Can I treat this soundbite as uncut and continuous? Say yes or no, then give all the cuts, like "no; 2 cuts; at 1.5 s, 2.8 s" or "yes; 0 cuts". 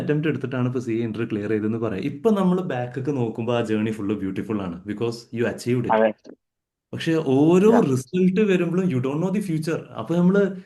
yes; 0 cuts